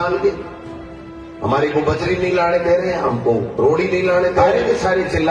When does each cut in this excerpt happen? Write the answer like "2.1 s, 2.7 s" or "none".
4.4 s